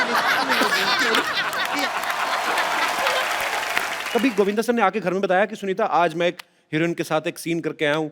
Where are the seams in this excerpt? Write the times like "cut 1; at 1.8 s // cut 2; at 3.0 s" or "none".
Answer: cut 1; at 4.0 s